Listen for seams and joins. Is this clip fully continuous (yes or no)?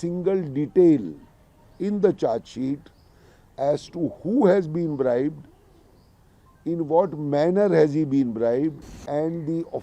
no